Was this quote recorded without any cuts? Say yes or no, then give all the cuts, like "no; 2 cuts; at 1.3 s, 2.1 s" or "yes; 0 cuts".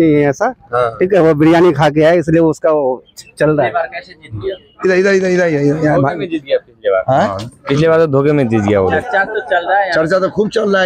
yes; 0 cuts